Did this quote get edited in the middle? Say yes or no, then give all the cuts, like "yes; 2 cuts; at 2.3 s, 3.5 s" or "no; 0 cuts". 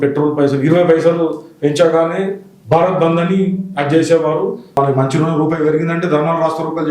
yes; 1 cut; at 4.7 s